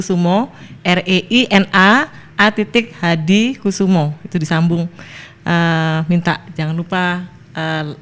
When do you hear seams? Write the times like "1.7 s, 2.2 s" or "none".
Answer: none